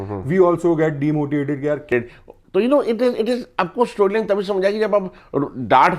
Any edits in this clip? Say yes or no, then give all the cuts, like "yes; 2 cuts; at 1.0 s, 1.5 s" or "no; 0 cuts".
yes; 1 cut; at 1.9 s